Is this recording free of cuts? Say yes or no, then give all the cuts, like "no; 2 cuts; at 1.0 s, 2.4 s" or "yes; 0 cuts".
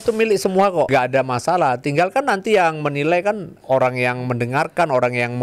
no; 2 cuts; at 0.9 s, 3.5 s